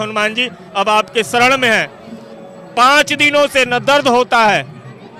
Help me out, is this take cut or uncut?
uncut